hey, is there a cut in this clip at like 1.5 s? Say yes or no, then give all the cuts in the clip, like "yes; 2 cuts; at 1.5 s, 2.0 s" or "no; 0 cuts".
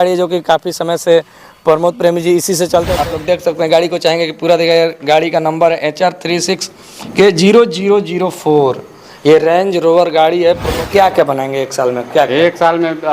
no; 2 cuts; at 2.9 s, 10.8 s